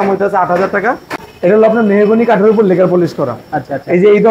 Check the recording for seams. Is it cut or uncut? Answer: cut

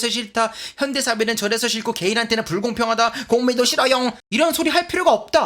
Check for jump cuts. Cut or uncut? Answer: uncut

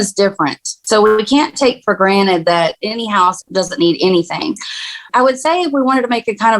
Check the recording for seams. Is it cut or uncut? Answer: cut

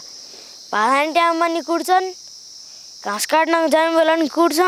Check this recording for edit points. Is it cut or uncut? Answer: uncut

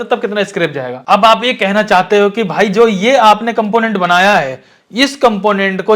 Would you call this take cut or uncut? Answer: cut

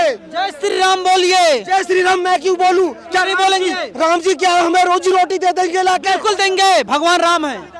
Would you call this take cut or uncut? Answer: uncut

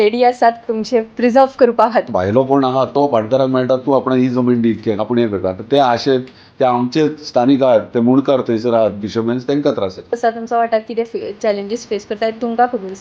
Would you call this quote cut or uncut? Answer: cut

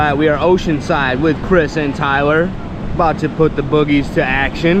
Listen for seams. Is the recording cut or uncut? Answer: uncut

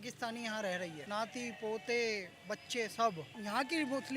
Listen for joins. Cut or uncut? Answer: cut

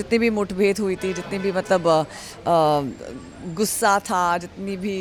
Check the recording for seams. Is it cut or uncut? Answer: uncut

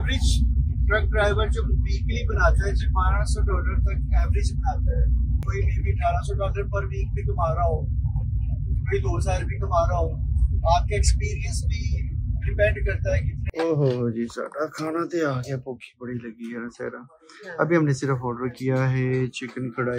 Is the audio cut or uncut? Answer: cut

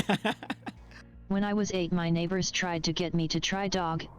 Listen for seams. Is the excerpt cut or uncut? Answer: cut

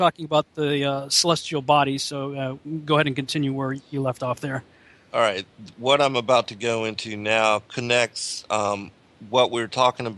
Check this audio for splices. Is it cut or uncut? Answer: cut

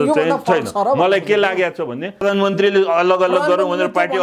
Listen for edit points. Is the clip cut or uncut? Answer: cut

